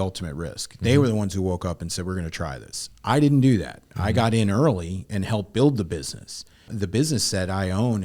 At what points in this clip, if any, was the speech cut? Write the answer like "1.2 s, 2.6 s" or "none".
6.7 s